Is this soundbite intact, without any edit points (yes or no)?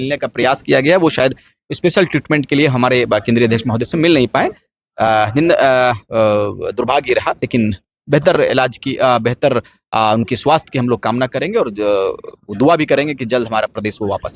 yes